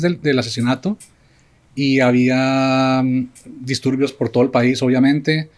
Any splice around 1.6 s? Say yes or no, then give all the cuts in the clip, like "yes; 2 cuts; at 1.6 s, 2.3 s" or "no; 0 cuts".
no; 0 cuts